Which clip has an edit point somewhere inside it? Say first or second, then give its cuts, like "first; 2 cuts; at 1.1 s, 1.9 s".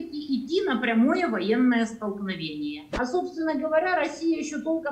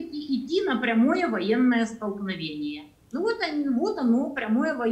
first; 1 cut; at 2.8 s